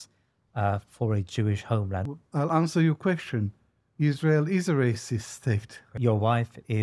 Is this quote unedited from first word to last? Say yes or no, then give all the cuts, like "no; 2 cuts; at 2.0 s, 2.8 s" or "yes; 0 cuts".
no; 2 cuts; at 2.0 s, 5.9 s